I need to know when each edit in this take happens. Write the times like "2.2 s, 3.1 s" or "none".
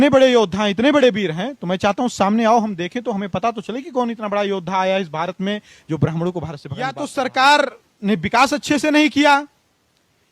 6.9 s

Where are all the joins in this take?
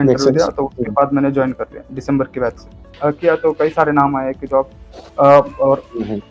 2.8 s

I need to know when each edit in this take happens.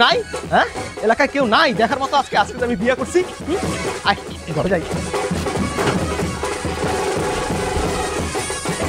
none

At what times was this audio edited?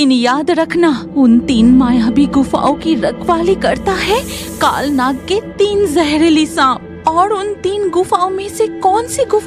1.0 s

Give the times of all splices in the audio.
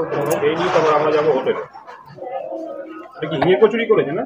none

